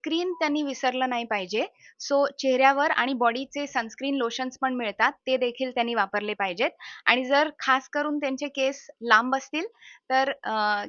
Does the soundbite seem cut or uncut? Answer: uncut